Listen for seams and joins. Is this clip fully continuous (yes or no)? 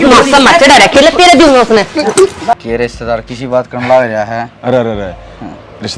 no